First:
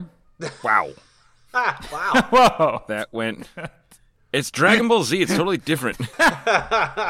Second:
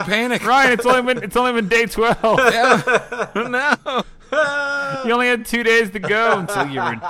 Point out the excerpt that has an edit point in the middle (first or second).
first